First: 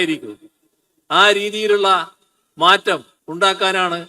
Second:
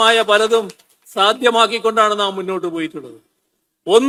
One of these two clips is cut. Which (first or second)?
first